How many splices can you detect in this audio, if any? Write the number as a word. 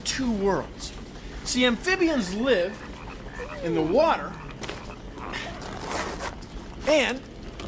one